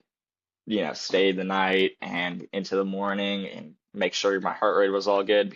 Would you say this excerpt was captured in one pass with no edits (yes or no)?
yes